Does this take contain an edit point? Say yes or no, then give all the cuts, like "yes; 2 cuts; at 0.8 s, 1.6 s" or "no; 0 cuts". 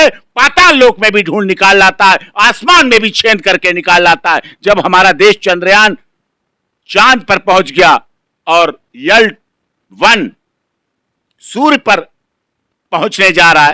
no; 0 cuts